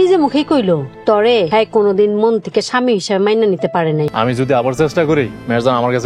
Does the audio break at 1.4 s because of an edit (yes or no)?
yes